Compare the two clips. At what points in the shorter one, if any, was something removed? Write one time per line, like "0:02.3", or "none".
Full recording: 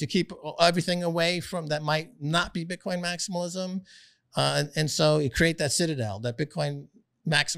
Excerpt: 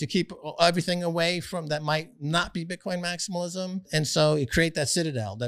0:03.9